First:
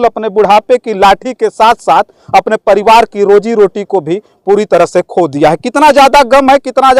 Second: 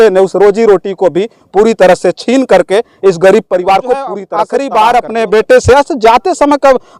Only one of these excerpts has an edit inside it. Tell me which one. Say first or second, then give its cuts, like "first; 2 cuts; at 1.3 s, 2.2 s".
second; 1 cut; at 4.3 s